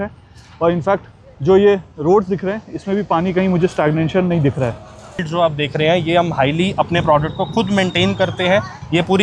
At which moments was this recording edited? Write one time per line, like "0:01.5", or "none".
0:05.2